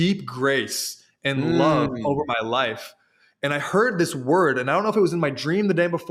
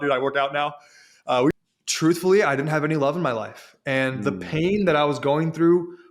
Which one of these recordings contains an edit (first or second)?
second